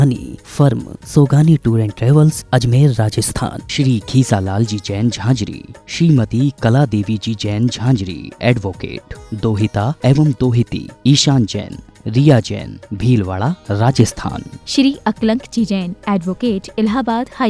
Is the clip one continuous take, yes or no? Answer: yes